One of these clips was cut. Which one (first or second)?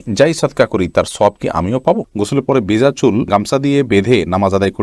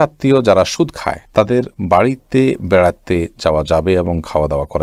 first